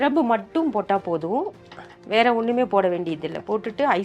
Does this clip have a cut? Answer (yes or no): no